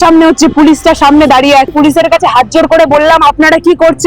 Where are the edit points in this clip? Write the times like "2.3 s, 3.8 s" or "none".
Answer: 1.7 s